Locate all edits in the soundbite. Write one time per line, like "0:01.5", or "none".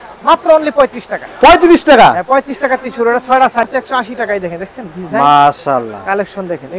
0:03.7